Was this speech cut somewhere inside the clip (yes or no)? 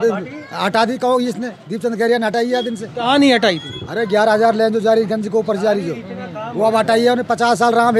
no